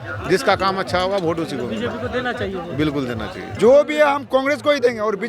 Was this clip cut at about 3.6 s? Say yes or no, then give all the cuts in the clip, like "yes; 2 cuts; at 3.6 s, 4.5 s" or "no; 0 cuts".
yes; 1 cut; at 3.6 s